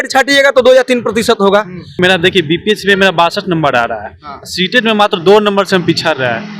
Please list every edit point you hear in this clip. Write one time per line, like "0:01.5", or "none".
0:01.9